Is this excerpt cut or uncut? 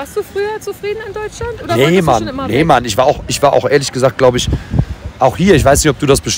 uncut